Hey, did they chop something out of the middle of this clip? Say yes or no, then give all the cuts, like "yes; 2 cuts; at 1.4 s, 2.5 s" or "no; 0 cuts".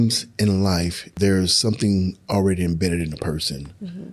yes; 1 cut; at 1.1 s